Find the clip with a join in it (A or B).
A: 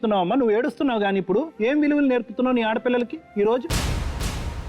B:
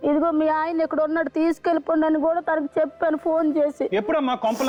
A